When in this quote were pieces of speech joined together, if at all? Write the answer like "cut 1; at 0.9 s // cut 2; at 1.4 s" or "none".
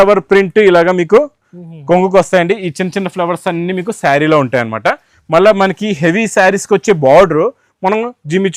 none